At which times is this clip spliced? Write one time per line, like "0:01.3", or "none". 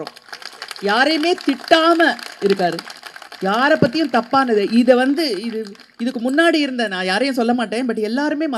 none